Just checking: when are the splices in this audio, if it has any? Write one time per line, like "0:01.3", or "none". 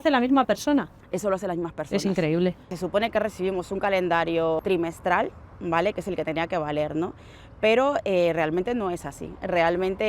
0:02.7
0:04.6